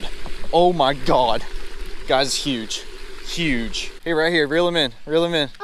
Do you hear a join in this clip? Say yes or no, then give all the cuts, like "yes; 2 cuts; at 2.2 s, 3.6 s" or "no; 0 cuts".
yes; 1 cut; at 3.9 s